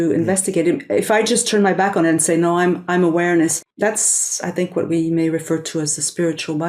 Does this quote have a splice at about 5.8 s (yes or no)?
no